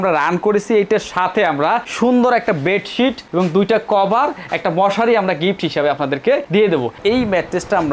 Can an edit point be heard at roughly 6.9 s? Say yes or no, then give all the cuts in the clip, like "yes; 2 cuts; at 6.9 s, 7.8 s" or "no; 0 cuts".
yes; 1 cut; at 6.9 s